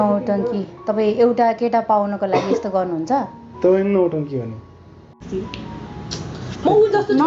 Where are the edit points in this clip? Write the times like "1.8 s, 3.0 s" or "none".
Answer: 5.2 s